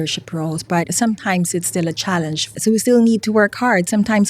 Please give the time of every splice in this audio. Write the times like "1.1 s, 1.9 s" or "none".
0.9 s, 2.6 s